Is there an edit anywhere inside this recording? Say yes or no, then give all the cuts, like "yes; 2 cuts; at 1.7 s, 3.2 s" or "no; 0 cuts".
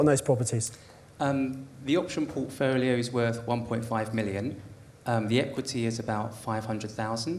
no; 0 cuts